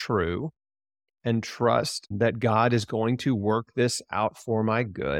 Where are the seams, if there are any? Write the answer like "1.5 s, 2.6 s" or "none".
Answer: 2.1 s

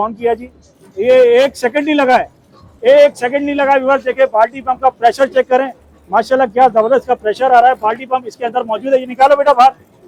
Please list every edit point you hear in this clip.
none

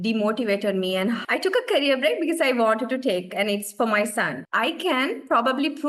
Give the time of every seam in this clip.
1.2 s, 4.4 s

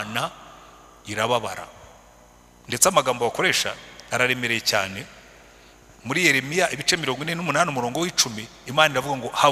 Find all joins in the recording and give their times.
none

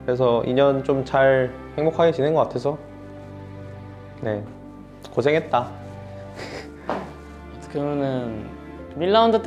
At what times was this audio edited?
1.6 s, 7.2 s

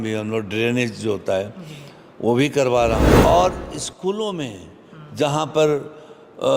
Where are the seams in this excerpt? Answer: 3.1 s

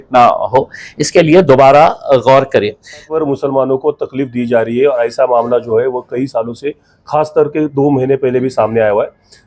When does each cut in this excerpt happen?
3.1 s

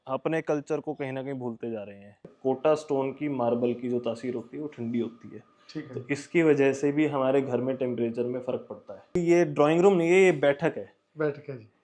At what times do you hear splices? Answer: 2.3 s, 9.1 s

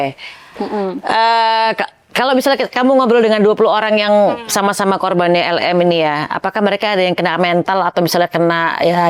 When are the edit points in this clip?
none

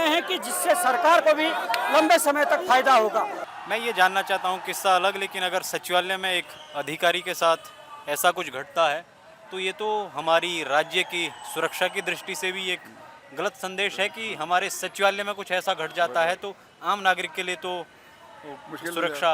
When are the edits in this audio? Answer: 3.4 s

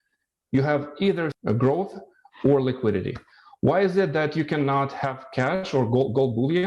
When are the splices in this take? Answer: 1.3 s

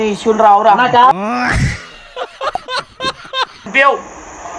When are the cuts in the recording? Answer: 1.1 s, 3.7 s

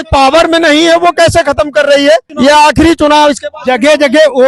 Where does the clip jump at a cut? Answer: 2.3 s

